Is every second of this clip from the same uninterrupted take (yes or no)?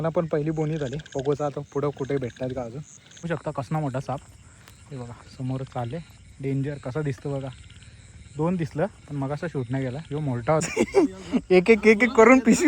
no